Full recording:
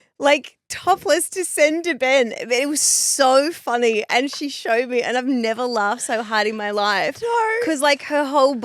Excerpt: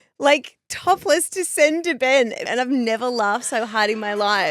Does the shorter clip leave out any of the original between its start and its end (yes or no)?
yes